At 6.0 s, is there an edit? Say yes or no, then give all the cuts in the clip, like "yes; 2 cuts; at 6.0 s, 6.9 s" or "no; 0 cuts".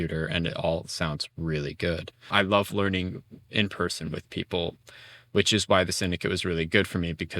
no; 1 cut; at 2.3 s